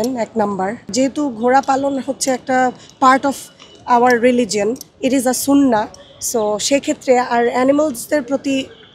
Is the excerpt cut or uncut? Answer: cut